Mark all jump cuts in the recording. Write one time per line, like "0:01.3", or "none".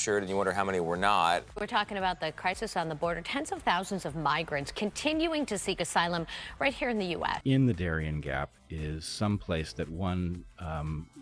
0:01.5
0:07.3